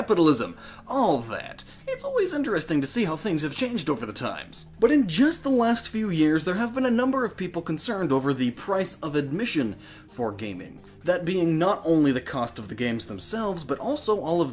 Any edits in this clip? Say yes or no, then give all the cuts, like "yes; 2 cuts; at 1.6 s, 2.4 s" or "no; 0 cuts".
yes; 1 cut; at 9.8 s